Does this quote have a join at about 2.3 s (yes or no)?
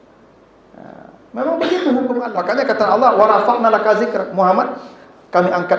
yes